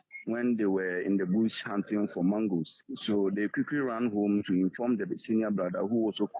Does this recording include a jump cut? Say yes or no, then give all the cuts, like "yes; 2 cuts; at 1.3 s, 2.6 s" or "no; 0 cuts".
no; 0 cuts